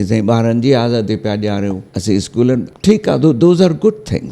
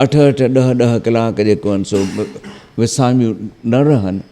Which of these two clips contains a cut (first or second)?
first